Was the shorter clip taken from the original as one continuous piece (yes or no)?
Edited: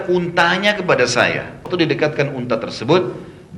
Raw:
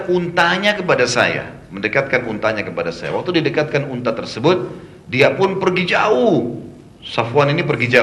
no